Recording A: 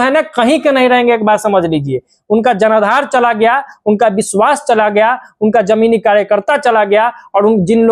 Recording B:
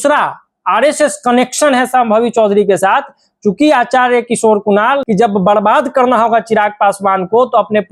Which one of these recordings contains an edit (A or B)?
B